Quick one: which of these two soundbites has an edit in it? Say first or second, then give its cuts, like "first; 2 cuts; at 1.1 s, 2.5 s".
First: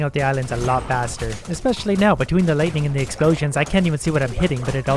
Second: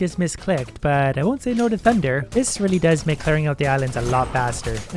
second; 1 cut; at 2.2 s